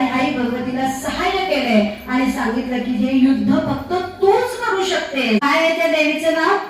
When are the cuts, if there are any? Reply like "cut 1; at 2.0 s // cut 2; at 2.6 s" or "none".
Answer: cut 1; at 5.4 s